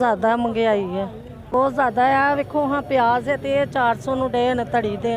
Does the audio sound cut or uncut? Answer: cut